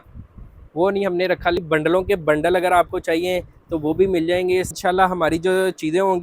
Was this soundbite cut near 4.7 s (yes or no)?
yes